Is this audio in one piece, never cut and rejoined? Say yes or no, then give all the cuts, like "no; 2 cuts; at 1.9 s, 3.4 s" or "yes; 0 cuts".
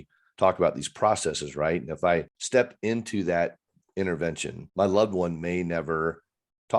no; 2 cuts; at 2.3 s, 4.5 s